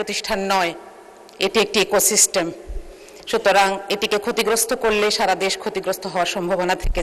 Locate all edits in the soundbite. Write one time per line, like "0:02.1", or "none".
none